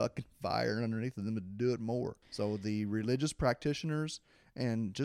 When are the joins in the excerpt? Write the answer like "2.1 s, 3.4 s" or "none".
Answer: 2.2 s